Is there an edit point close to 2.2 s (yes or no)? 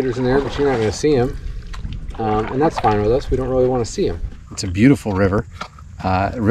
no